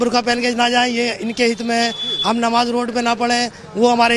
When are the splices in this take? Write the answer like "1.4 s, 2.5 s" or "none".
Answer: none